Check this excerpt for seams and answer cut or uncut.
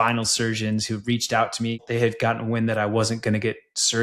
cut